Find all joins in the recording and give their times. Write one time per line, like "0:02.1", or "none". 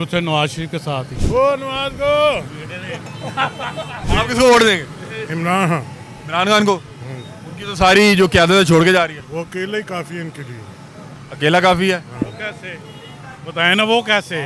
0:01.1
0:04.0